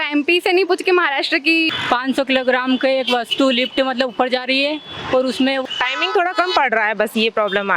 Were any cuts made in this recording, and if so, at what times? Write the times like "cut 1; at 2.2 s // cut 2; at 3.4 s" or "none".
cut 1; at 1.7 s // cut 2; at 5.6 s